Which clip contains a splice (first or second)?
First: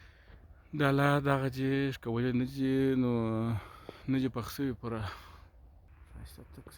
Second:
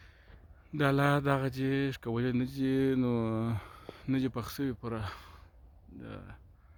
first